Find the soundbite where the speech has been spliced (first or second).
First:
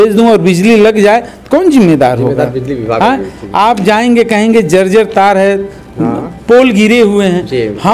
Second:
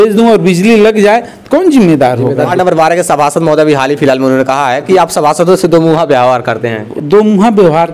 second